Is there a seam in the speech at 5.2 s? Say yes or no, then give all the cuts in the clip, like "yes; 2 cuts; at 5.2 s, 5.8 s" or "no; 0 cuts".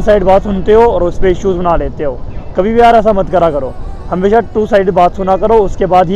no; 0 cuts